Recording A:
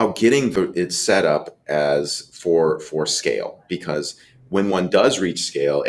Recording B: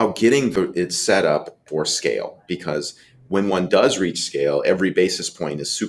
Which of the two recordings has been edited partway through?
B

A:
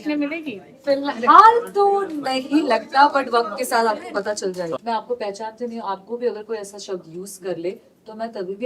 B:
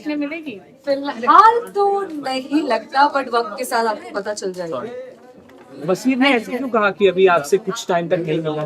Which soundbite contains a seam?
A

